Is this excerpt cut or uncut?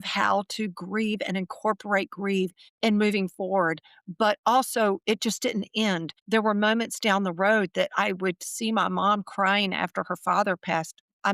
cut